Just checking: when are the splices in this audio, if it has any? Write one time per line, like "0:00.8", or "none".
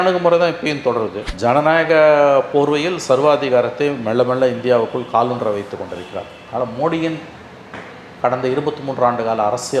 0:01.3